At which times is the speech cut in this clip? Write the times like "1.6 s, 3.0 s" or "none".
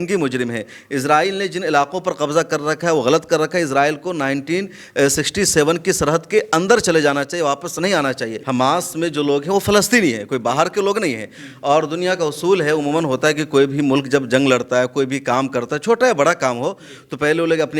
8.3 s